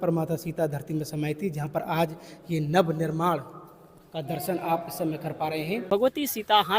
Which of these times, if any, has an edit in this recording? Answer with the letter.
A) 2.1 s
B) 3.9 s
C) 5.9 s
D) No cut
C